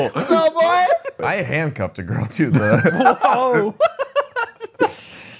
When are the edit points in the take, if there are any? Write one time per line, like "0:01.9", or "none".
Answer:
0:01.2